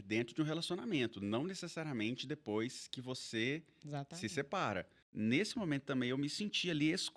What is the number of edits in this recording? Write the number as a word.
one